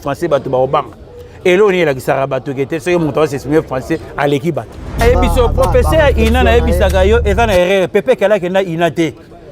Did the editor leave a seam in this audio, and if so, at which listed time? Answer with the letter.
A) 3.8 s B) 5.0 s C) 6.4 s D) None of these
B